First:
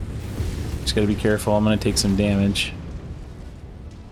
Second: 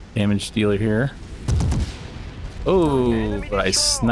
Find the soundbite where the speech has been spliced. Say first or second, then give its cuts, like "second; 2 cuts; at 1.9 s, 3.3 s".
second; 1 cut; at 2.5 s